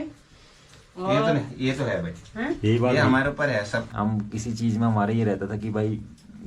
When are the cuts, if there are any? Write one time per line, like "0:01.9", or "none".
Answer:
0:03.8